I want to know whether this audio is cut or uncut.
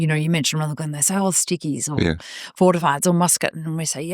uncut